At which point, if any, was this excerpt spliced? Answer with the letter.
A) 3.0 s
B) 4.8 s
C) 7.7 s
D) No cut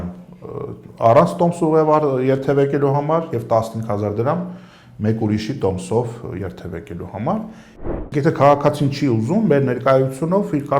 C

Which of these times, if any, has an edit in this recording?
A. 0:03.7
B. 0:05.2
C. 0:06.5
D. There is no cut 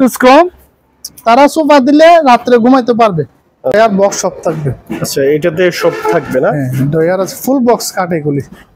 A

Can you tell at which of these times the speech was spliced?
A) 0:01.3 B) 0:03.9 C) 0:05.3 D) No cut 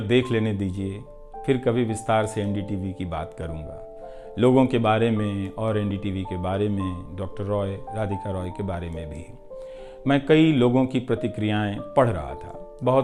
D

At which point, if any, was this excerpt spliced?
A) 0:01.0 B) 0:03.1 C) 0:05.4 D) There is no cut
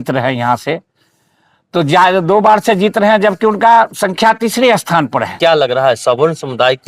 C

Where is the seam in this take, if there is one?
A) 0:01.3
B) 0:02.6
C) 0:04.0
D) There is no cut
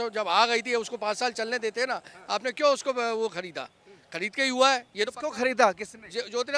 D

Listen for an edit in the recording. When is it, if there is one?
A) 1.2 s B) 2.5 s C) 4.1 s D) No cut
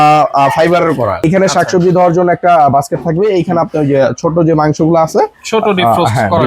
A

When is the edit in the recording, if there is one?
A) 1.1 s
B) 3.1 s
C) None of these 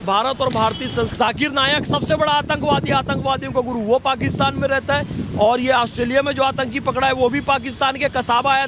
A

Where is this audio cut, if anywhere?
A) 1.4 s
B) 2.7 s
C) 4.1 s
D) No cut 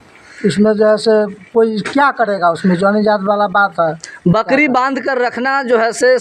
D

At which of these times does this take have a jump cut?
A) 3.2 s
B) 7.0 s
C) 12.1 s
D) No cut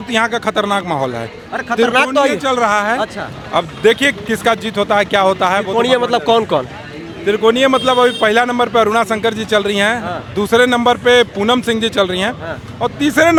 D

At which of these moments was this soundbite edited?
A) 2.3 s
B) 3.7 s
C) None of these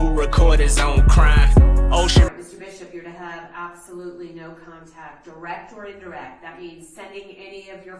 A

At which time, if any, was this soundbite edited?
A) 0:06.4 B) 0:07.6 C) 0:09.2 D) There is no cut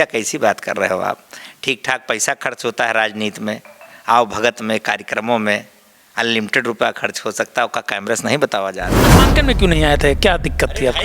C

